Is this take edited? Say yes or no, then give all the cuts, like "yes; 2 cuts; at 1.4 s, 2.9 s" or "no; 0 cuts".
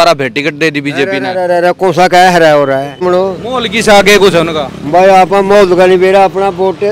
yes; 1 cut; at 3.0 s